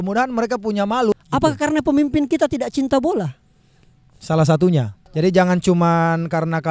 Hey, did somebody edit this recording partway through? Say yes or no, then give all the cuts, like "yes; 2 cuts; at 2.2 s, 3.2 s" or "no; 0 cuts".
yes; 2 cuts; at 1.1 s, 5.2 s